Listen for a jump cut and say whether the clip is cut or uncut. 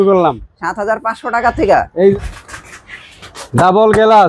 cut